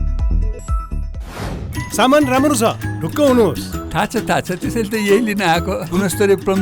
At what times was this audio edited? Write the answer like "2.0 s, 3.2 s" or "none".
1.7 s

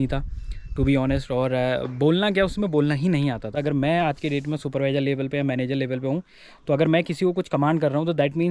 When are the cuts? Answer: 3.5 s

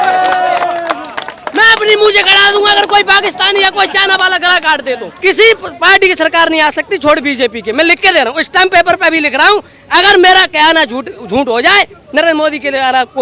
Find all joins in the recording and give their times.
5.1 s

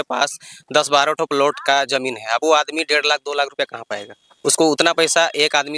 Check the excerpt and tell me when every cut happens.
none

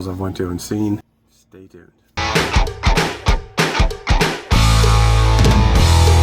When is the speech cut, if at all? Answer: 2.1 s

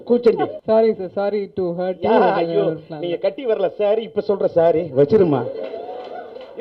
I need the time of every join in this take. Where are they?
none

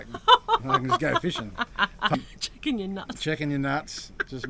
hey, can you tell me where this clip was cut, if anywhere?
2.1 s

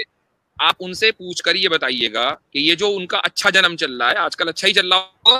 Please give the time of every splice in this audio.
2.4 s

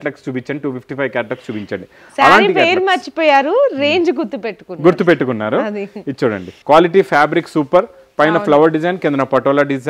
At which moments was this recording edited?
none

